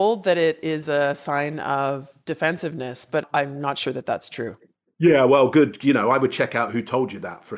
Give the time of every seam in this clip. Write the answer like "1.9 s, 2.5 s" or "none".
3.2 s